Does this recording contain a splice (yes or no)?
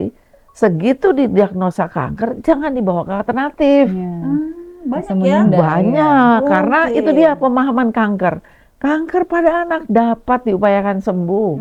no